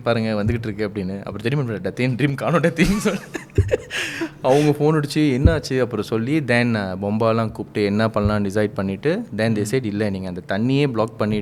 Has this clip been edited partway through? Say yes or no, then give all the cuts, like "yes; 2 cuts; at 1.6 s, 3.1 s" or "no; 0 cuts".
no; 0 cuts